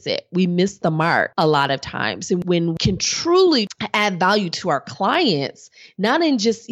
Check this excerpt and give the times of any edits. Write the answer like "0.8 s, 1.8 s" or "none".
1.3 s, 2.4 s, 3.7 s